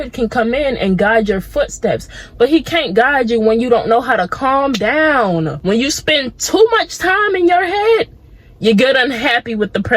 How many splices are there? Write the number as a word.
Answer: one